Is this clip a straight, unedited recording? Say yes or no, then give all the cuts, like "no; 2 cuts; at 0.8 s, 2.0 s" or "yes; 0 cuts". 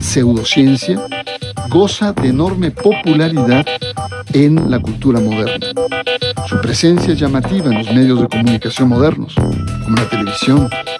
no; 1 cut; at 2.1 s